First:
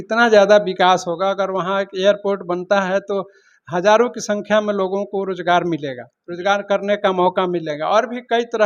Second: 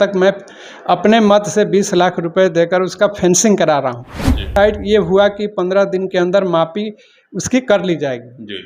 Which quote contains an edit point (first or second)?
second